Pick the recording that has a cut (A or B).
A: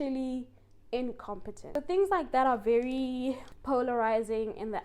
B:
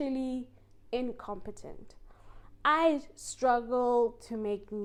A